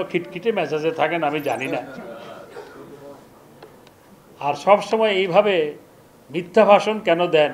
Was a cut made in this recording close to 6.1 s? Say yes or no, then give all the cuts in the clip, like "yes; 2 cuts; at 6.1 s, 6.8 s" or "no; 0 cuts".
no; 0 cuts